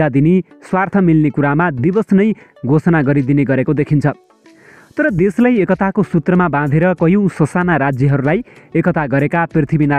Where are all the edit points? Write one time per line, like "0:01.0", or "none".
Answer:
none